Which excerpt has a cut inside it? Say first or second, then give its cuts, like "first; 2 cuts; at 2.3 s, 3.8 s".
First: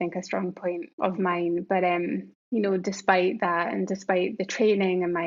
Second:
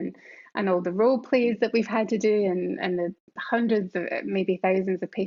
first; 2 cuts; at 0.9 s, 2.3 s